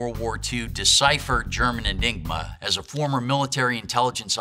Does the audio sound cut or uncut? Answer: cut